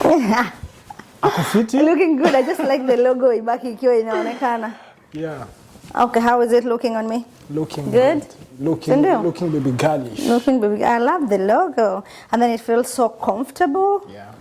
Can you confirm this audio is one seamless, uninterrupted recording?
yes; 0 cuts

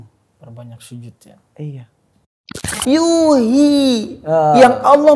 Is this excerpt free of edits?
no; 1 cut; at 2.7 s

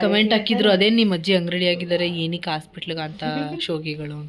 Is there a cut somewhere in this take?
no; 0 cuts

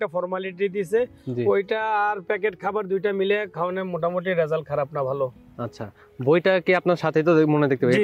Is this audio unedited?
yes; 0 cuts

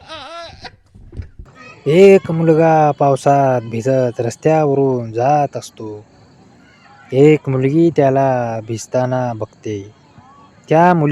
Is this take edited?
yes; 1 cut; at 1.4 s

